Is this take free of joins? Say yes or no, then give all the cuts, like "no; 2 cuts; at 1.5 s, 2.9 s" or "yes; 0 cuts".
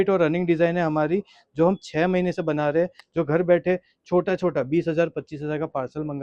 no; 1 cut; at 3.0 s